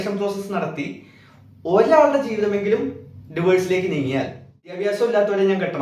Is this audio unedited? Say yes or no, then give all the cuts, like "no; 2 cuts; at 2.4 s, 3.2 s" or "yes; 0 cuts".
no; 1 cut; at 4.7 s